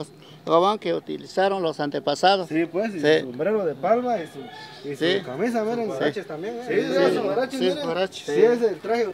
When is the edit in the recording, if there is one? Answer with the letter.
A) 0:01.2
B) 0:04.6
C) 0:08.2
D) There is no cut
D